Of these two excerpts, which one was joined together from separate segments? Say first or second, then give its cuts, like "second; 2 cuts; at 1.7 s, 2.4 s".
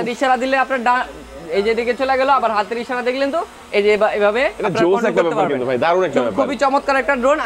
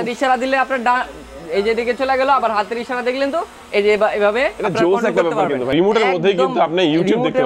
second; 1 cut; at 5.7 s